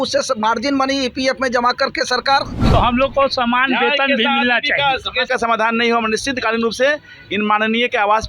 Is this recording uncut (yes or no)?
no